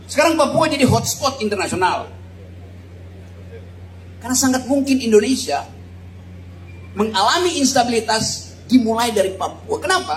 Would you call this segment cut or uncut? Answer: uncut